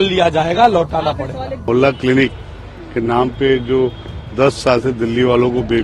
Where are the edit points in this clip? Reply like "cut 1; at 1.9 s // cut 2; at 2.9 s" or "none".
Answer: cut 1; at 1.7 s